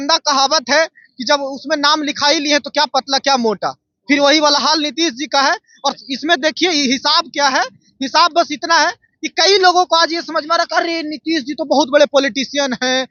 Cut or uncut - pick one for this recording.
uncut